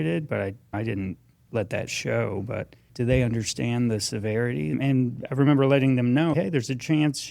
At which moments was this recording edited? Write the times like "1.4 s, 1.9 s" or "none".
2.8 s, 4.7 s, 6.3 s